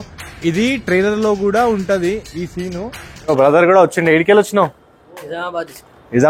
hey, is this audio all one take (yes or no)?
no